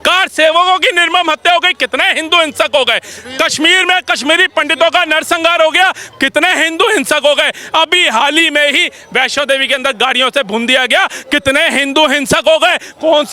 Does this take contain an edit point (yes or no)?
no